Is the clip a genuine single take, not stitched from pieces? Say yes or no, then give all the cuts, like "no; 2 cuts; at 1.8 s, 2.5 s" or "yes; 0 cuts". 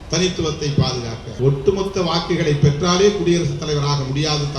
no; 1 cut; at 1.2 s